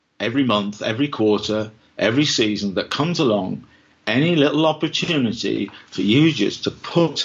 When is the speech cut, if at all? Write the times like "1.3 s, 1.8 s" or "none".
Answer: none